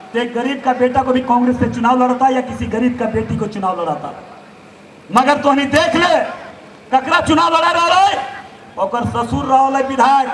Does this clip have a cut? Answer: no; 0 cuts

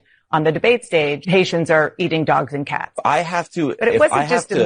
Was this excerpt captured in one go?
no; 2 cuts; at 1.2 s, 3.0 s

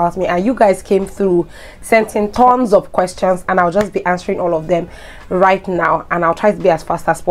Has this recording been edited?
no; 0 cuts

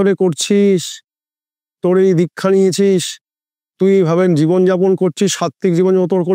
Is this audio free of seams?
yes; 0 cuts

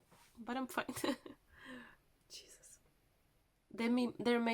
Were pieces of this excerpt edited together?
yes; 1 cut; at 3.4 s

